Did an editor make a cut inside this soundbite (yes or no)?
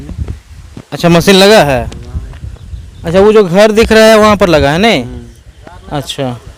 no